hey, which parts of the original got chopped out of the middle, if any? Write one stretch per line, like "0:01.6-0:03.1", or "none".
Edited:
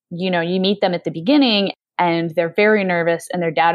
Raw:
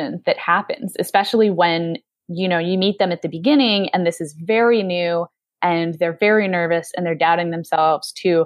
0:03.9-0:05.3